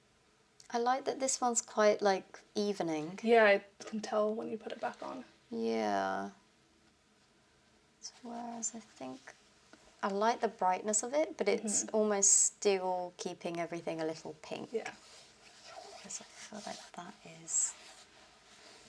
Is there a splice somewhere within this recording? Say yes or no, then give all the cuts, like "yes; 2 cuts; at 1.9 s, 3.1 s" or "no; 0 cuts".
no; 0 cuts